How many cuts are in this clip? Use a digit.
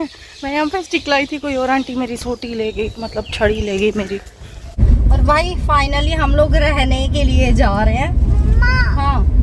1